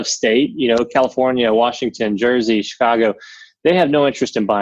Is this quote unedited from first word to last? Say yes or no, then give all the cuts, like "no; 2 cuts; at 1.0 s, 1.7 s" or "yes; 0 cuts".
yes; 0 cuts